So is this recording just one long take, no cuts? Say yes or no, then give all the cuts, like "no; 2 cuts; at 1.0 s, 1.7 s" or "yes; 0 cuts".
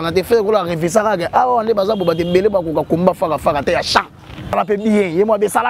no; 1 cut; at 4.5 s